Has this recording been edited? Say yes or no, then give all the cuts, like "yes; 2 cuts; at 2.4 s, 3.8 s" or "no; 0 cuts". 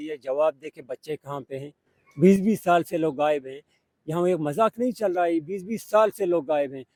no; 0 cuts